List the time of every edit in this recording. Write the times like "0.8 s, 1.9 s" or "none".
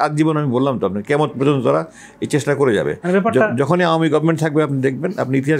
none